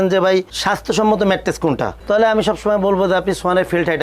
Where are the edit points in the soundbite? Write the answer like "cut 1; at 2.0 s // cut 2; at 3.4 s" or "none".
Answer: none

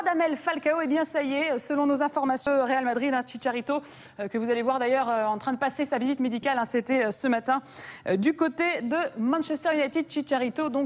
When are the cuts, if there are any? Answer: cut 1; at 3.2 s

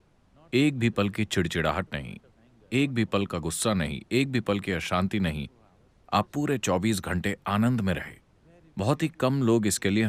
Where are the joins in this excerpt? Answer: none

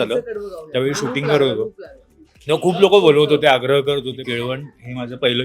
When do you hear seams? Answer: cut 1; at 4.2 s

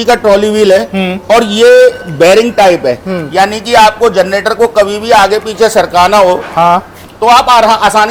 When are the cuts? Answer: none

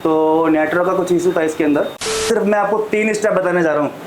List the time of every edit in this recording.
cut 1; at 2.2 s

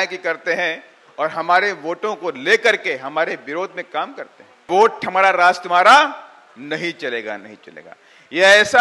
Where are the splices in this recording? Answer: cut 1; at 4.6 s

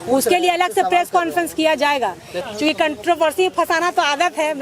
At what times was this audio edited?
cut 1; at 2.4 s

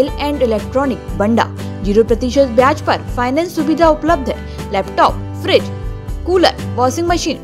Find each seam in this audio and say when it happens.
none

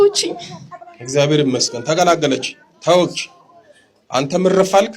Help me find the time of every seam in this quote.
none

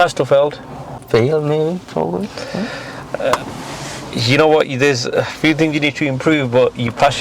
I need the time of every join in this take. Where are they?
cut 1; at 0.9 s

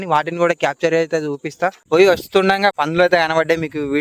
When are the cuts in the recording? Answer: cut 1; at 1.8 s // cut 2; at 2.7 s

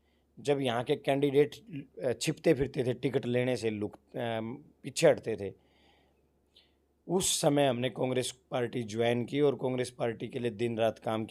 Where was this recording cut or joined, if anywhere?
none

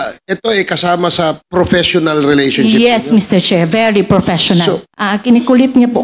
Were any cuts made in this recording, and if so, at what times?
cut 1; at 4.9 s

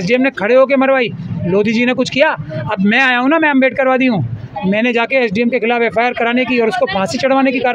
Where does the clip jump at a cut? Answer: none

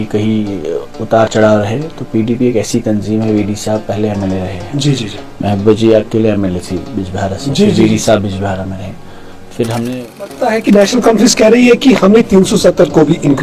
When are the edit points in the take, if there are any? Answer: cut 1; at 10.4 s

